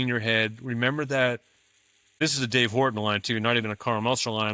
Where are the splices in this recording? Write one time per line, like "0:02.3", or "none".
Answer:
0:02.2